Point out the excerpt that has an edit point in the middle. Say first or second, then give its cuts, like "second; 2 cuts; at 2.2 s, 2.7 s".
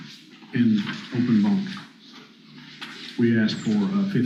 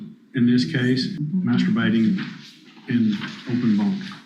second; 1 cut; at 1.2 s